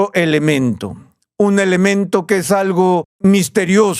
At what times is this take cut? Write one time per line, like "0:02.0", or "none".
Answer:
0:03.1